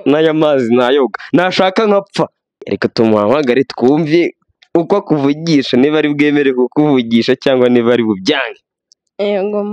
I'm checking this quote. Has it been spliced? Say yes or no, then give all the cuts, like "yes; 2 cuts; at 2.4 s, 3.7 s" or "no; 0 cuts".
yes; 1 cut; at 2.7 s